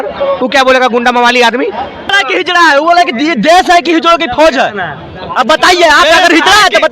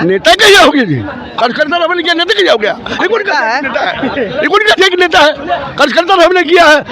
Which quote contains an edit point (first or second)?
first